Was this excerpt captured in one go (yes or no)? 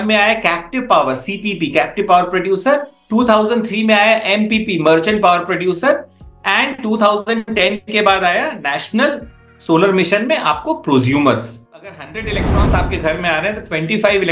no